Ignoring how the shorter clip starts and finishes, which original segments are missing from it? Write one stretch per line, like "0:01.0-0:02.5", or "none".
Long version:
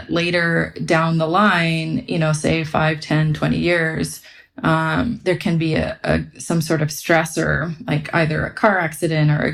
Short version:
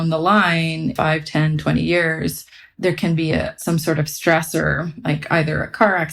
0:02.0-0:02.7
0:04.5-0:05.2
0:06.0-0:06.4